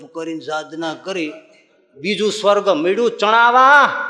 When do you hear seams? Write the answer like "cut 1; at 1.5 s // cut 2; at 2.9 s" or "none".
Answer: none